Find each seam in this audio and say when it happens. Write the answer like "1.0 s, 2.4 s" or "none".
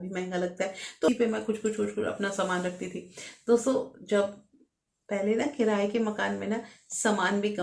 1.1 s